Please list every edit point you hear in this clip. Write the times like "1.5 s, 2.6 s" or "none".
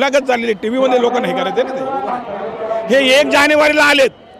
2.2 s